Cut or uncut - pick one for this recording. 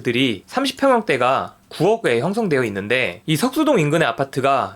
cut